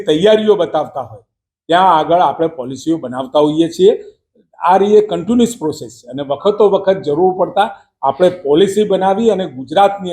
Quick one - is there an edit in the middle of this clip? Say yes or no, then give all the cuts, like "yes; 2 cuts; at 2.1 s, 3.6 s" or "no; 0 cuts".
no; 0 cuts